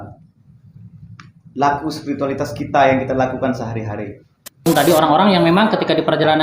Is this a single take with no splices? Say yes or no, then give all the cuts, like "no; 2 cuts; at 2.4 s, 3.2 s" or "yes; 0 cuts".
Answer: no; 1 cut; at 4.7 s